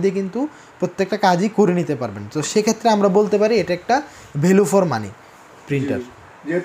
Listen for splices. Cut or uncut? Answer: uncut